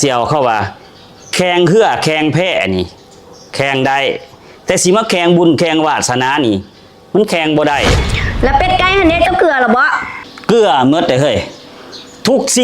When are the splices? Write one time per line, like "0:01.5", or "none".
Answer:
0:08.0